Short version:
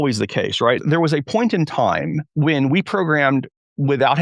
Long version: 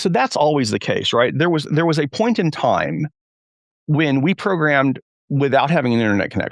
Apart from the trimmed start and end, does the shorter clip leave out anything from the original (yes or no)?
yes